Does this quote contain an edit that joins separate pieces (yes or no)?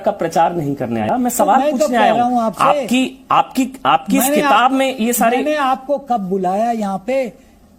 yes